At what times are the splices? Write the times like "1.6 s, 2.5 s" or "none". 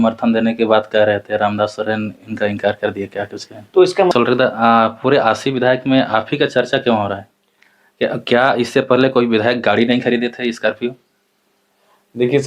4.1 s